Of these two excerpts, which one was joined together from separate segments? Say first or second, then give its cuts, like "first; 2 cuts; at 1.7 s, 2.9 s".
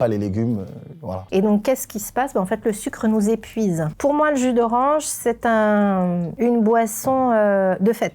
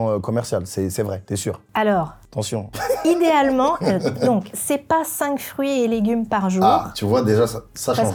first; 2 cuts; at 1.3 s, 3.9 s